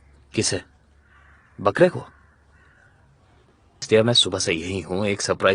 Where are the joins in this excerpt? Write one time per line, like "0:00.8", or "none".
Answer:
0:03.8